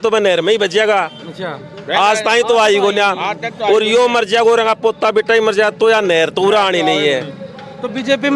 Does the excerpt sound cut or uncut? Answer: uncut